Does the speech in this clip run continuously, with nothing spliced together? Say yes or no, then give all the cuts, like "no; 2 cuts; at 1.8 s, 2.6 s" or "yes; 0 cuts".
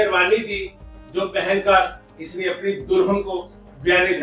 yes; 0 cuts